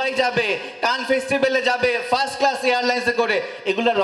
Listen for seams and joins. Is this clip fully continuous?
yes; 0 cuts

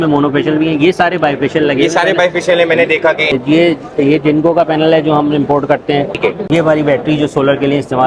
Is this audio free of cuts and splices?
no; 2 cuts; at 3.3 s, 6.2 s

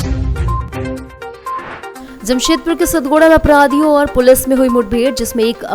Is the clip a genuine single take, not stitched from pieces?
no; 1 cut; at 1.6 s

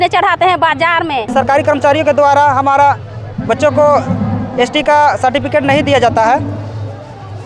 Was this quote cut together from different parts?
yes; 1 cut; at 1.3 s

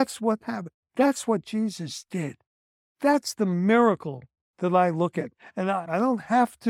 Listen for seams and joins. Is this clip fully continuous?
yes; 0 cuts

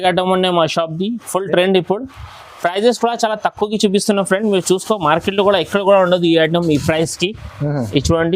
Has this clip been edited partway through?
no; 0 cuts

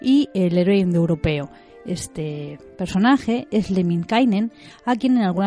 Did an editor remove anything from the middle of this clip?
yes; 1 cut; at 2.0 s

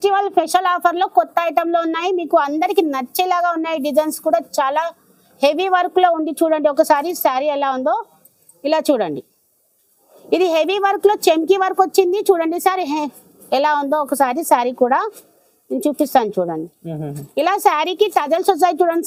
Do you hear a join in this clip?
no; 0 cuts

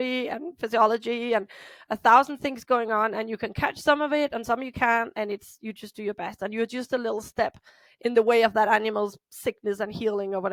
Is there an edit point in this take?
no; 0 cuts

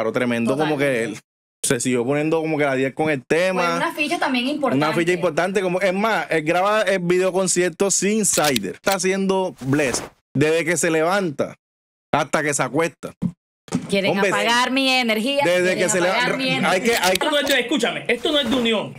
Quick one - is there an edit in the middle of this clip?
yes; 2 cuts; at 8.8 s, 17.2 s

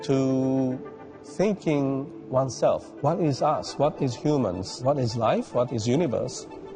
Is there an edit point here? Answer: no; 0 cuts

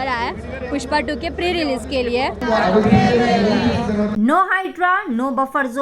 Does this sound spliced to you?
yes; 2 cuts; at 2.4 s, 4.1 s

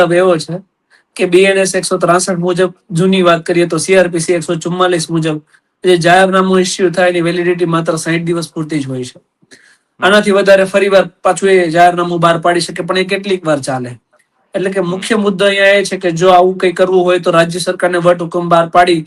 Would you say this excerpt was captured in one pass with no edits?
yes; 0 cuts

